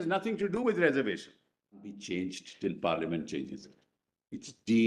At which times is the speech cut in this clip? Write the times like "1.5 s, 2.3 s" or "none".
2.0 s